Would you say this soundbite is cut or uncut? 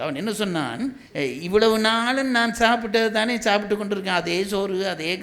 cut